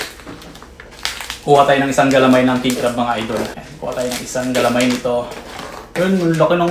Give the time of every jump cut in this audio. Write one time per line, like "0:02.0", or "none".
0:03.7